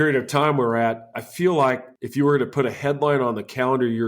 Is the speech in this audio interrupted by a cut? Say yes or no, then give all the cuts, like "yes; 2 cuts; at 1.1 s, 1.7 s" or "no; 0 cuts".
yes; 2 cuts; at 1.1 s, 1.9 s